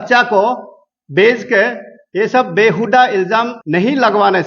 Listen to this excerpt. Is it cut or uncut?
uncut